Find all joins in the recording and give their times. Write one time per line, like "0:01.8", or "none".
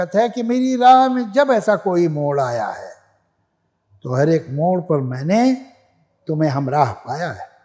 none